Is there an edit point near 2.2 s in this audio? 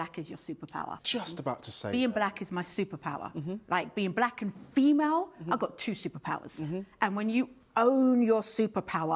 no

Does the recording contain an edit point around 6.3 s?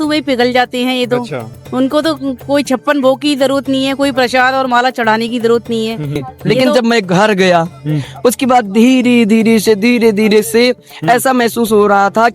yes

